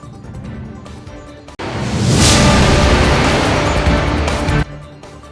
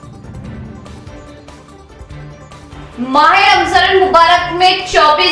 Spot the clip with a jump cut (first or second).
second